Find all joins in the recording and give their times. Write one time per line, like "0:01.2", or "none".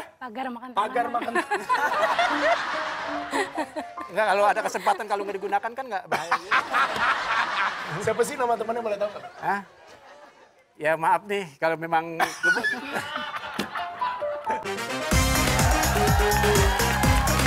0:14.8